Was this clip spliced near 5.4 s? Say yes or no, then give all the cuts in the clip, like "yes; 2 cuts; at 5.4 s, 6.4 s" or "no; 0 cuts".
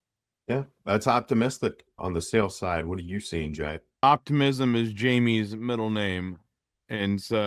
no; 2 cuts; at 1.9 s, 4.0 s